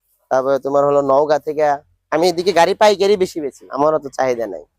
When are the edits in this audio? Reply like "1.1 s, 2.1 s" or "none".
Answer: 3.6 s